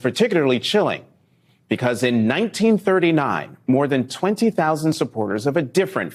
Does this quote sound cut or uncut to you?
uncut